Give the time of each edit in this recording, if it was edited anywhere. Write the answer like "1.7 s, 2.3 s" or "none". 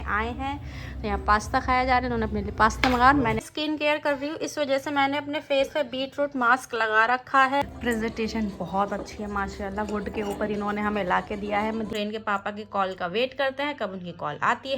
3.4 s, 7.7 s, 11.9 s